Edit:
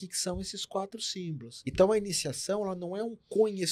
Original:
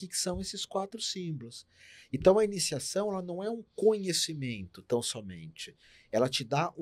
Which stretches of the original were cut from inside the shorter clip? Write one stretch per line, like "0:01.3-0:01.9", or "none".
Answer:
0:01.5-0:02.0